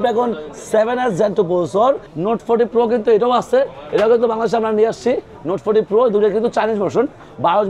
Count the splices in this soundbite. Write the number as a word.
one